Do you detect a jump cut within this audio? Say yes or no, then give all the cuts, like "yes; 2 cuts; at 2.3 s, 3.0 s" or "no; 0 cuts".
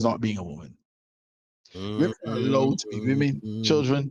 no; 0 cuts